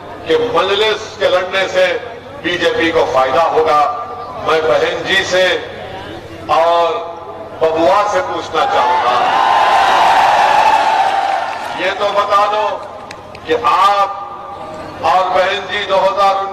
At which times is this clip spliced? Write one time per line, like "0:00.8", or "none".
none